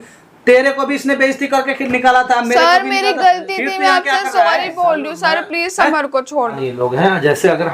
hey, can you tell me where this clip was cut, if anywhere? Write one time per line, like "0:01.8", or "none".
0:06.6

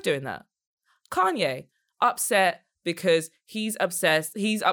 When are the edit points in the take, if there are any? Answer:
none

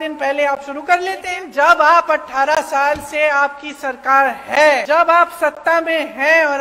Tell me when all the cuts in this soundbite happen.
0:01.4
0:04.8

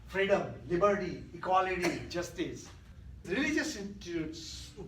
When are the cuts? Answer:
0:03.2

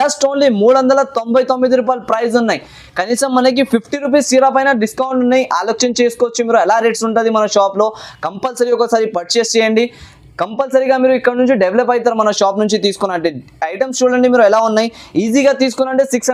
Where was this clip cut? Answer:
none

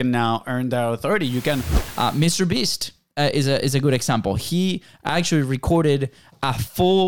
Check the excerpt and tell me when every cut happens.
0:01.8

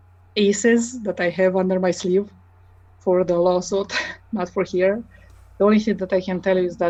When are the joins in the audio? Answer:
none

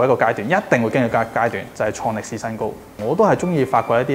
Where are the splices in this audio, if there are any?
0:02.9

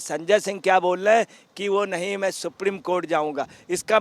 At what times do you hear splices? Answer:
none

